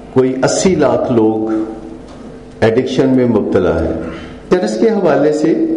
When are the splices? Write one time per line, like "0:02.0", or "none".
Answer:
0:04.5